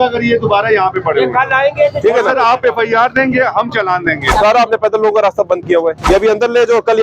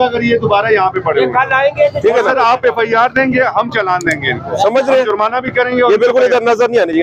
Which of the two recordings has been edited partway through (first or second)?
first